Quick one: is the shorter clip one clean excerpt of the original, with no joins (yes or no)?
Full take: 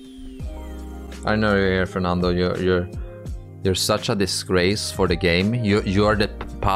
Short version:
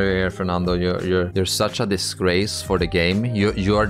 no